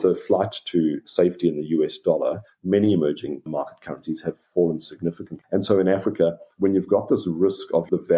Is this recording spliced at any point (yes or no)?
yes